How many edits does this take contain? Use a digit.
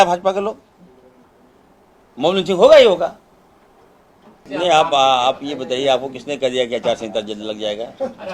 1